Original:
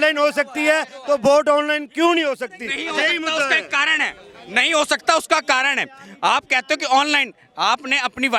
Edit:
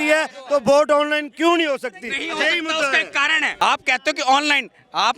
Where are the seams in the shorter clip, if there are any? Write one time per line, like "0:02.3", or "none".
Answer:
0:03.4